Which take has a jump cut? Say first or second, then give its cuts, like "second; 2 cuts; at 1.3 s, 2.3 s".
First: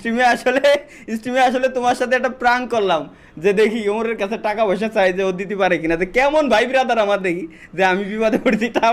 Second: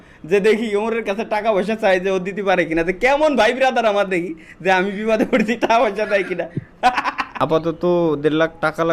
second; 1 cut; at 7.3 s